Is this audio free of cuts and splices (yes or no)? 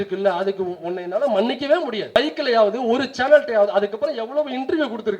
no